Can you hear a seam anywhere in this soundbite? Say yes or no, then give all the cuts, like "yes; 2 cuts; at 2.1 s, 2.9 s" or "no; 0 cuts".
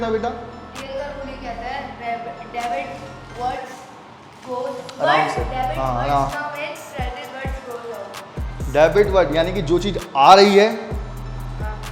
no; 0 cuts